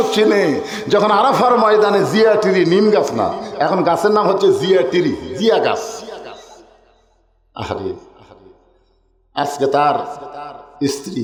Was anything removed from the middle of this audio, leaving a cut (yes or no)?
no